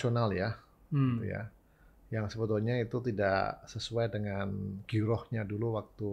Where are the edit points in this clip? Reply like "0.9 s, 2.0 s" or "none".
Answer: none